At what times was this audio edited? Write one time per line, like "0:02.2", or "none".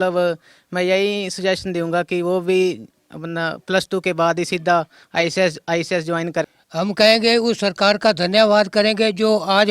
0:06.5